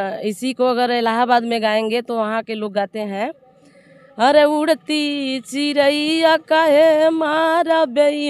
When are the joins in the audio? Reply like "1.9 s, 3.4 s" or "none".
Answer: none